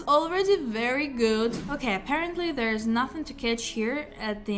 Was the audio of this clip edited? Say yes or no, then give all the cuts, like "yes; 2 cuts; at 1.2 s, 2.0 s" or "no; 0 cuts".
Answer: yes; 1 cut; at 1.6 s